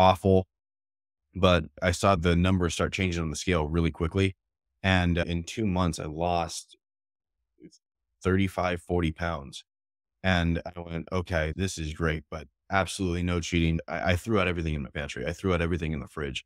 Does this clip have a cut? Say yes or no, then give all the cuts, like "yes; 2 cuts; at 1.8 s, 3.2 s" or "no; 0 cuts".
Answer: yes; 4 cuts; at 2.1 s, 5.2 s, 11.5 s, 13.8 s